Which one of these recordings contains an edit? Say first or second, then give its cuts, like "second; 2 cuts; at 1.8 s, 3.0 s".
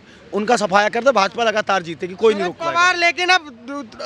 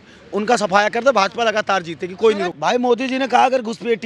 second; 1 cut; at 2.5 s